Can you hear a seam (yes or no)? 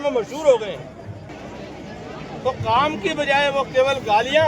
yes